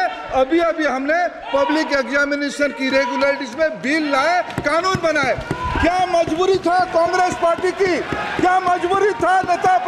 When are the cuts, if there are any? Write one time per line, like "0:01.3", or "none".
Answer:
none

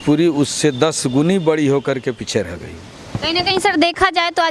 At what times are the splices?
none

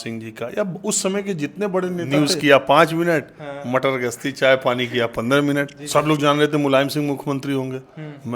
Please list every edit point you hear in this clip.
0:02.1
0:05.8

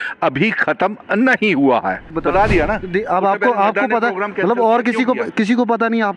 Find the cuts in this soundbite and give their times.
0:02.1

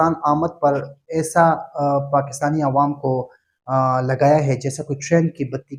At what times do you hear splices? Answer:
none

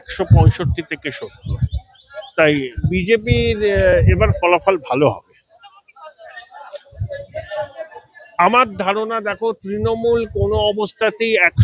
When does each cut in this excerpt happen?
none

